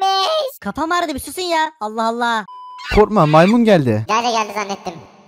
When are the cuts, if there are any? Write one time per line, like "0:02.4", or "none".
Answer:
0:02.9